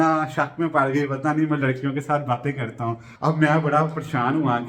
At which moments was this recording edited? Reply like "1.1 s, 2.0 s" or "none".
3.1 s